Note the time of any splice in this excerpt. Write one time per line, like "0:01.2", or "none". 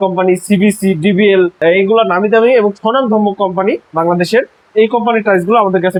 none